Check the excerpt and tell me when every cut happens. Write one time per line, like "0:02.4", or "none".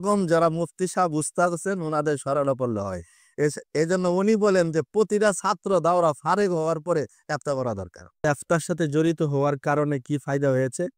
0:08.2